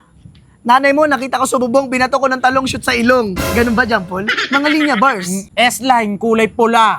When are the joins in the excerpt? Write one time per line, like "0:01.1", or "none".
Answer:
0:05.4